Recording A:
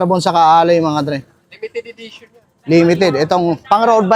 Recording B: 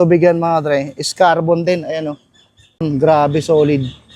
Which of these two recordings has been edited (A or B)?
B